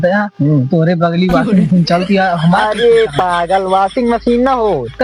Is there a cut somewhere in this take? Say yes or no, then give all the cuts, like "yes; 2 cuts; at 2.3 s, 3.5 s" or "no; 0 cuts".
no; 0 cuts